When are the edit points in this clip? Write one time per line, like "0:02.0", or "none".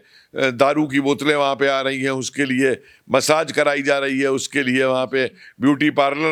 none